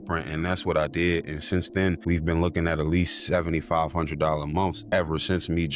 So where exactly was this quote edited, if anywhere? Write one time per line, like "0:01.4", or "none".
0:04.7